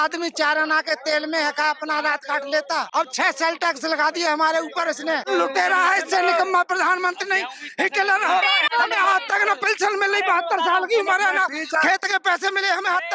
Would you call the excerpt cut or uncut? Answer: cut